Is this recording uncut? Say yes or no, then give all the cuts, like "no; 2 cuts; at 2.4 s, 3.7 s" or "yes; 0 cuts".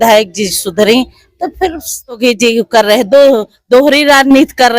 no; 1 cut; at 2.2 s